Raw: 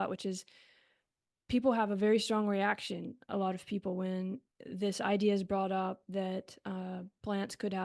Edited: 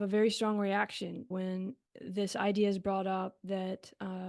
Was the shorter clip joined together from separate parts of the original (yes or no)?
yes